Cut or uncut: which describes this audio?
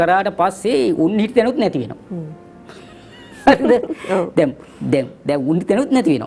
uncut